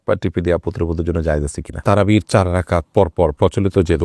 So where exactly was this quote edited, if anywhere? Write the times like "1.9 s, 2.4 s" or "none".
1.7 s